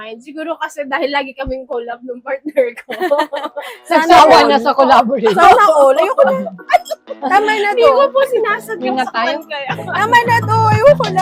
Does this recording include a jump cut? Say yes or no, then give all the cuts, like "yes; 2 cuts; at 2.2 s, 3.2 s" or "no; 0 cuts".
no; 0 cuts